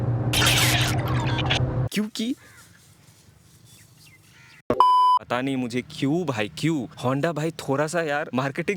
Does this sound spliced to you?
yes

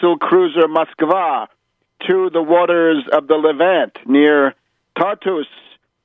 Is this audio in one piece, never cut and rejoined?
no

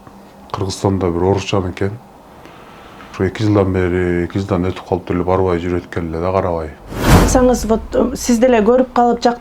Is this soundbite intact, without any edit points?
no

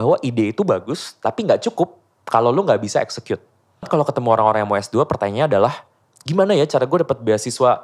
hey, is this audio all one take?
no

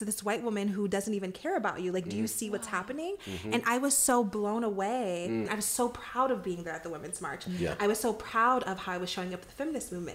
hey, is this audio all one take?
no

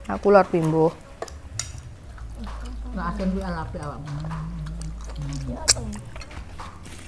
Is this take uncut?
yes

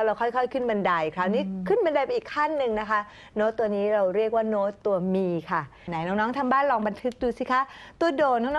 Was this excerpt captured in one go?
no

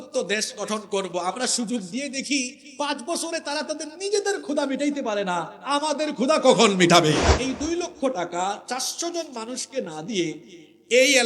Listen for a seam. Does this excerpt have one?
yes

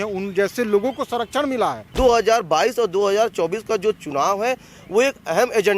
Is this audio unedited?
no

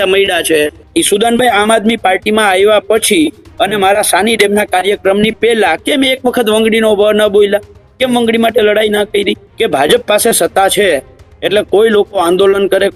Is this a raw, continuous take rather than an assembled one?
no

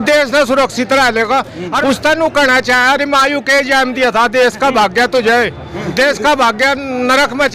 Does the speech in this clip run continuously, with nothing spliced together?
no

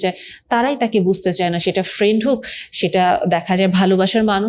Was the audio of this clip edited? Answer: no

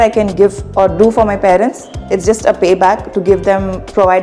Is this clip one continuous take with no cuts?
yes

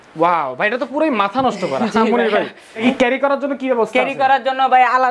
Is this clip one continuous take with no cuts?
no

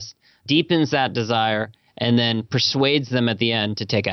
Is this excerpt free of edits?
yes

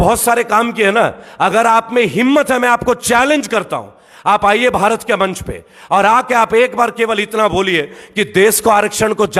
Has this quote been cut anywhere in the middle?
no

